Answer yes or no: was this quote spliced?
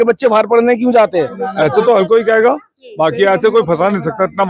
yes